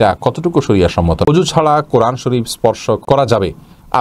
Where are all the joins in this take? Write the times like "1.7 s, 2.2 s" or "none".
1.3 s, 3.0 s